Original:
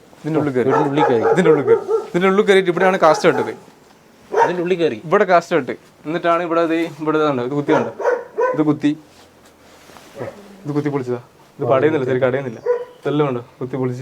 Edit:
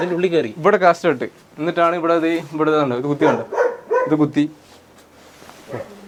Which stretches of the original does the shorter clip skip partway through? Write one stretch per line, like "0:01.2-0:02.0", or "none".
none